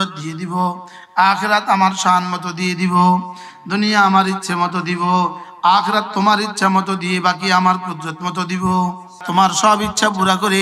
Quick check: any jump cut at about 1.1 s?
no; 1 cut; at 9.2 s

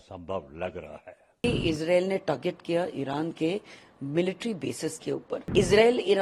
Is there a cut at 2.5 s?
no; 2 cuts; at 1.2 s, 5.4 s

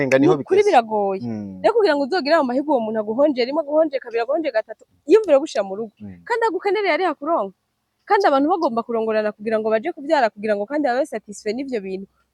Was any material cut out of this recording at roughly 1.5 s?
no; 0 cuts

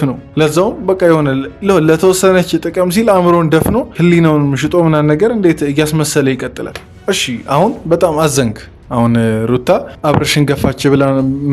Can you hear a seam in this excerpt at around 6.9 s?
yes; 1 cut; at 6.9 s

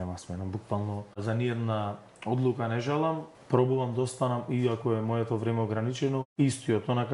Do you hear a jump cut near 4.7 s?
no; 3 cuts; at 1.2 s, 3.3 s, 6.3 s

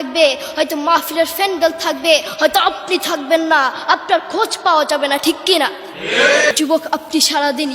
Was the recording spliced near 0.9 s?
no; 1 cut; at 6.5 s

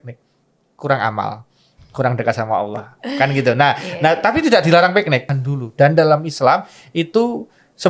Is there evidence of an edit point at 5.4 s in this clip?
yes; 1 cut; at 5.4 s

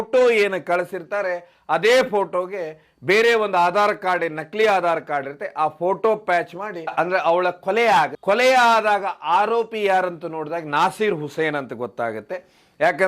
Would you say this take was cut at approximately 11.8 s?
no; 1 cut; at 6.8 s

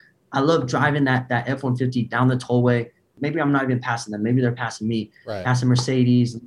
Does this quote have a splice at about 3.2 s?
yes; 1 cut; at 3.2 s

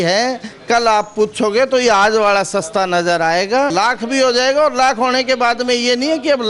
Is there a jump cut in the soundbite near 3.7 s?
yes; 1 cut; at 3.7 s

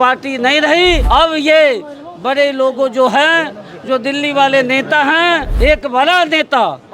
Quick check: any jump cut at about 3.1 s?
no; 2 cuts; at 1.0 s, 5.5 s

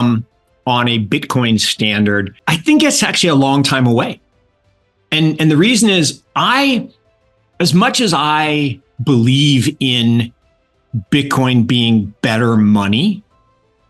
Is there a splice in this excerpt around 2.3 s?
yes; 1 cut; at 2.3 s

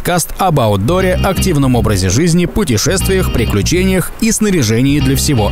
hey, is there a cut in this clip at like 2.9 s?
no; 0 cuts

